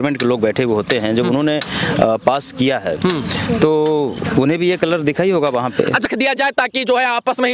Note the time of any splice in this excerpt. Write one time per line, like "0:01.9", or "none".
0:06.1